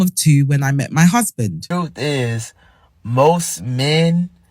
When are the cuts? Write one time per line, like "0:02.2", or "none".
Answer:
0:01.6